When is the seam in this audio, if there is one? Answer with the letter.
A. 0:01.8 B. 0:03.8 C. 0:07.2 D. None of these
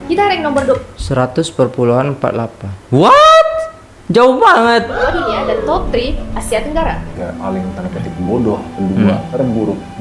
C